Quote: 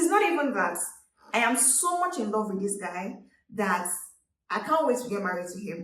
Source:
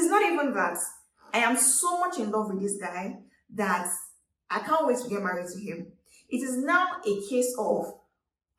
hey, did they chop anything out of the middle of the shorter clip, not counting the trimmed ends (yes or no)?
no